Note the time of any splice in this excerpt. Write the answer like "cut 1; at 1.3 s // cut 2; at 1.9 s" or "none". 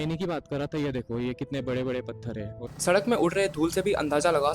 cut 1; at 2.7 s